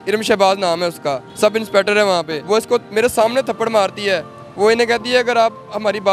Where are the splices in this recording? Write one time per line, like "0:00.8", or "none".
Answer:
0:01.3
0:02.4